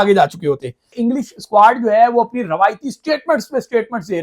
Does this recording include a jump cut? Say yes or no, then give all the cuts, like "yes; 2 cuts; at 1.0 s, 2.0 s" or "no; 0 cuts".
yes; 1 cut; at 0.9 s